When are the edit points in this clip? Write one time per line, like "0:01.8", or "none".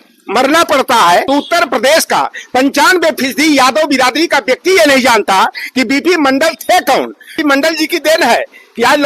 0:01.2
0:07.4